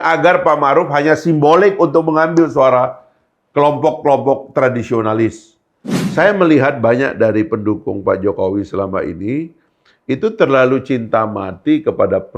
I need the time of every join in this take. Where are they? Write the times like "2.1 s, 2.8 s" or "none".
5.9 s